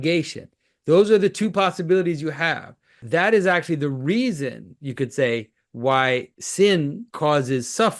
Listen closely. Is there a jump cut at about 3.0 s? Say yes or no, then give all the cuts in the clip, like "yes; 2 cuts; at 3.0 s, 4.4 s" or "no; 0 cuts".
yes; 3 cuts; at 3.0 s, 6.4 s, 7.0 s